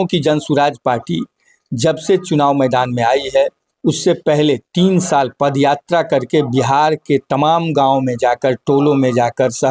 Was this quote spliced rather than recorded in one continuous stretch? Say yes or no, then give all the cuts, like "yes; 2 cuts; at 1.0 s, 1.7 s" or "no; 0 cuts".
no; 0 cuts